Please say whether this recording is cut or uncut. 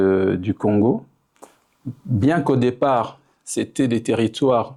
uncut